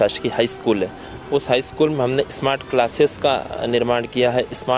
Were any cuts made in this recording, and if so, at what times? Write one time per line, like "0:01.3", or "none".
none